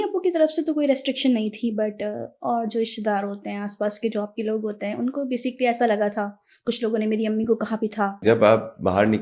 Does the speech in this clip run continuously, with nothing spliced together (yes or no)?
no